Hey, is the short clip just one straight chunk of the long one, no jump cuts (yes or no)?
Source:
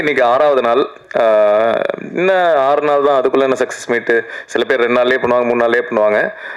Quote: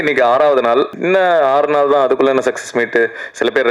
no